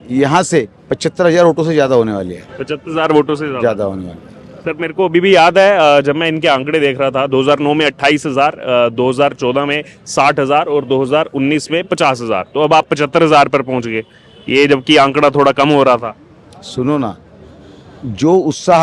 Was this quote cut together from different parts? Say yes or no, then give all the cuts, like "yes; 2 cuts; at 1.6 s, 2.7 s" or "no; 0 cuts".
no; 0 cuts